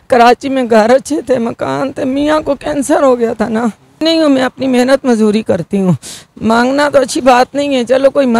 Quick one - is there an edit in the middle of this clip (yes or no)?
yes